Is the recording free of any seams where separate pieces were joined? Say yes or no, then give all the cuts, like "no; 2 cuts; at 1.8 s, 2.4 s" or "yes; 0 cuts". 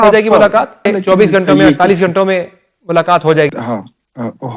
no; 2 cuts; at 0.9 s, 3.5 s